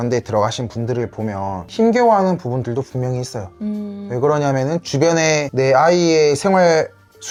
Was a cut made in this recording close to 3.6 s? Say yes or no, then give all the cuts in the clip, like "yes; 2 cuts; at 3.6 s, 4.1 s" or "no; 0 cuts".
no; 0 cuts